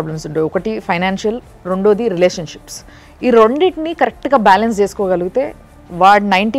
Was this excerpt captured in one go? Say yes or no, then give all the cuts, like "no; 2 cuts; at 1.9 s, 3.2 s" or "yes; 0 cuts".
yes; 0 cuts